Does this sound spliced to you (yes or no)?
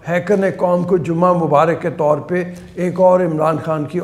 no